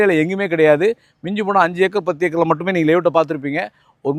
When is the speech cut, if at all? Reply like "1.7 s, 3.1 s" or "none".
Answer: none

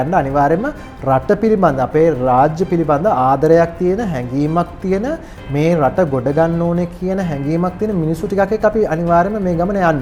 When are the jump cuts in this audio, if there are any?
none

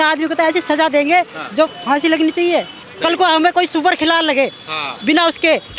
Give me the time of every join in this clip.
1.8 s, 2.8 s

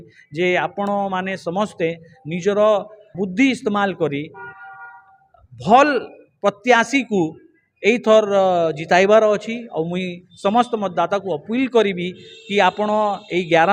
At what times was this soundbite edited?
3.1 s

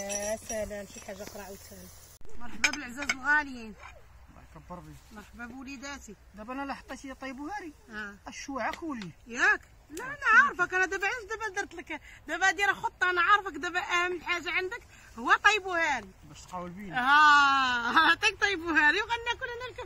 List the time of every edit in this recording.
2.1 s

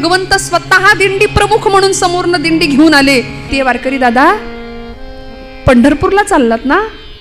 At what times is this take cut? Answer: 3.5 s

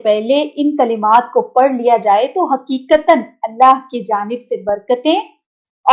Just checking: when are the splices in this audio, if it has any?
none

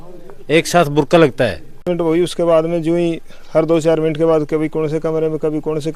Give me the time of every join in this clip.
1.8 s

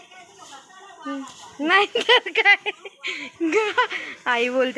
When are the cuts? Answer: none

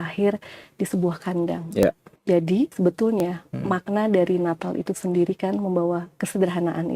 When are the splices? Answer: 1.8 s, 2.7 s

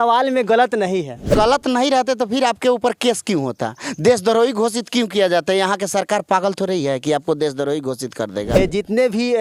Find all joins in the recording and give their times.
1.3 s, 8.6 s

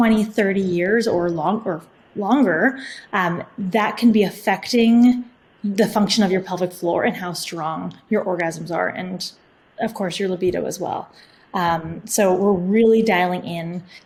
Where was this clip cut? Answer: none

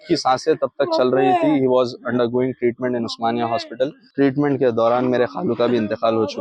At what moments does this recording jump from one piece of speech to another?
4.0 s

